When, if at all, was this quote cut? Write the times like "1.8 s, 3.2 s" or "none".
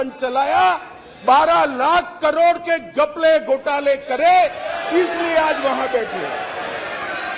none